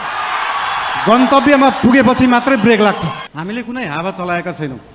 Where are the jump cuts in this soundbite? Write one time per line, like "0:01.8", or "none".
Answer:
0:03.2